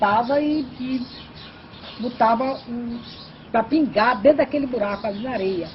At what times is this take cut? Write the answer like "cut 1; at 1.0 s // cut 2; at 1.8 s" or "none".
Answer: none

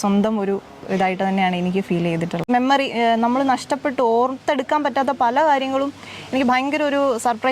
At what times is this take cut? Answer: cut 1; at 2.4 s

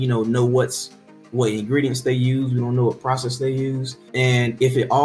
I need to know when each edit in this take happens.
cut 1; at 4.0 s

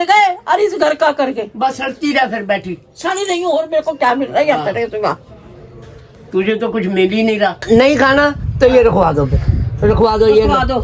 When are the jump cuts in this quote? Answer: cut 1; at 7.6 s

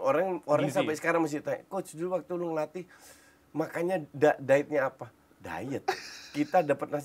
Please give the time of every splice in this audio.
none

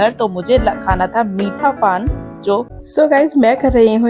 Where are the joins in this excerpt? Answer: cut 1; at 2.8 s

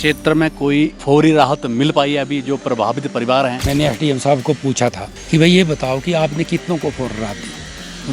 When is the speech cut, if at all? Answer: cut 1; at 1.0 s // cut 2; at 3.6 s // cut 3; at 5.1 s

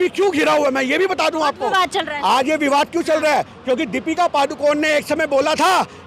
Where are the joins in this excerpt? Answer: none

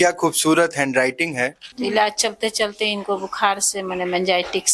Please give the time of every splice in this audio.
cut 1; at 1.7 s

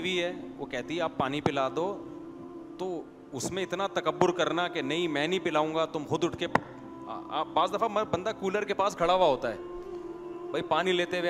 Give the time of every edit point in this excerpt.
none

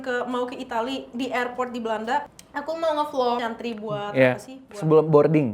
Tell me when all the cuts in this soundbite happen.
cut 1; at 2.4 s // cut 2; at 3.4 s

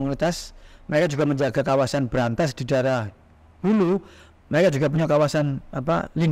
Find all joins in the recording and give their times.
none

